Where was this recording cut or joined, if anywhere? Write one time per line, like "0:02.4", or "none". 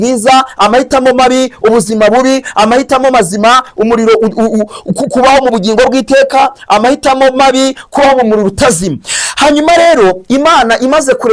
none